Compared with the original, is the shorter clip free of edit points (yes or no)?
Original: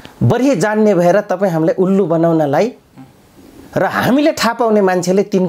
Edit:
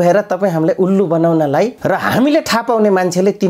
no